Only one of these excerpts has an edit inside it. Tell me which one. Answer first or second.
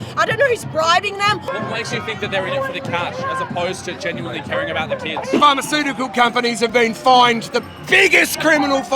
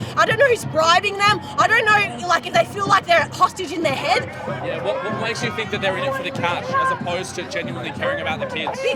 first